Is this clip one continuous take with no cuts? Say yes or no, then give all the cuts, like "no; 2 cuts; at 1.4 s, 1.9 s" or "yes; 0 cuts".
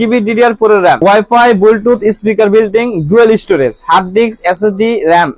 no; 1 cut; at 1.0 s